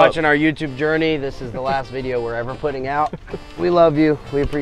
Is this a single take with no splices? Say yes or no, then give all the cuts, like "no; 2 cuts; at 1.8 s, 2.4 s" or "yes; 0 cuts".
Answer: yes; 0 cuts